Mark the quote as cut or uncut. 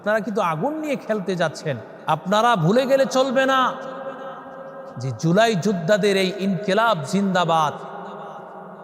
cut